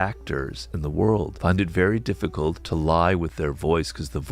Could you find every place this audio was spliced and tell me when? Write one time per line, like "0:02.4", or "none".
0:01.3
0:02.6